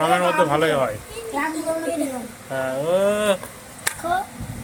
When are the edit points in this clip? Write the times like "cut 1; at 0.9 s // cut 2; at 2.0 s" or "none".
none